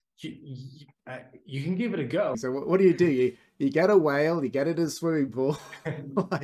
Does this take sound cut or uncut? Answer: cut